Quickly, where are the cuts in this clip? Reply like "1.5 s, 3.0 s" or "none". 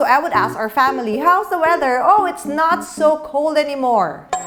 none